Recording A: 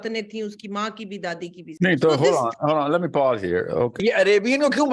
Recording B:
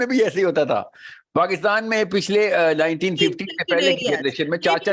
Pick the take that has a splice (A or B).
A